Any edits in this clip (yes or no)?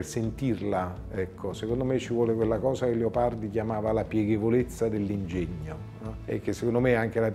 no